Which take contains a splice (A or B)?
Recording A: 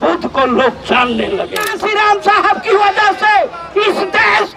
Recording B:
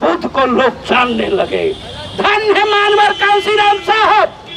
A